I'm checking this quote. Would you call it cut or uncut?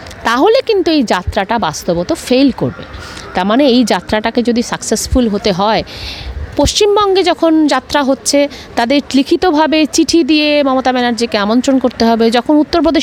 uncut